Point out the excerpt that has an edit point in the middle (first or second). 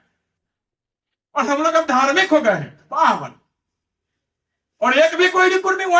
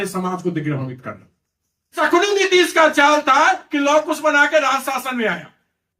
second